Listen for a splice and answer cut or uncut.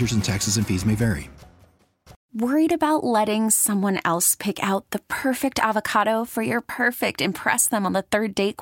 cut